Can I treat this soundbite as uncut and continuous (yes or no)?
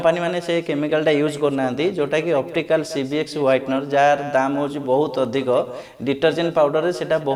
yes